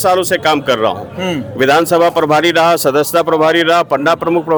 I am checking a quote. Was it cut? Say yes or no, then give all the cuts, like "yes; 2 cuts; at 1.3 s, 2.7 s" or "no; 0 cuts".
no; 0 cuts